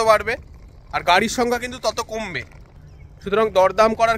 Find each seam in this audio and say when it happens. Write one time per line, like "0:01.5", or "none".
0:02.7